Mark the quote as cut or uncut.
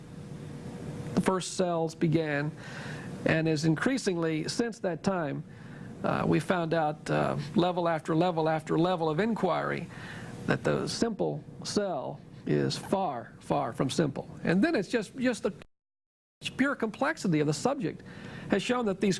uncut